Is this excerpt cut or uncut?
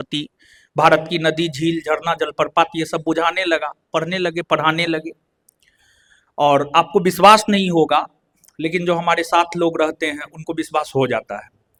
uncut